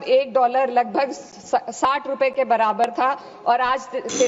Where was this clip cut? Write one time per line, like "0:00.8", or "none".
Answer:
none